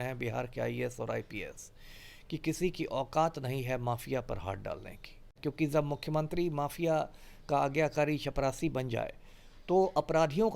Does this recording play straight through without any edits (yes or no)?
no